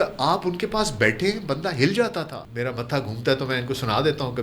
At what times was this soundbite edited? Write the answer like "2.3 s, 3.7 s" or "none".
2.4 s